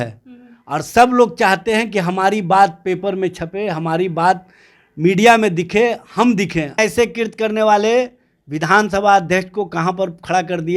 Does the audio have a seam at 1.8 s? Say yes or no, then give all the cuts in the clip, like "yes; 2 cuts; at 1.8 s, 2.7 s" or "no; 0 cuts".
no; 1 cut; at 6.8 s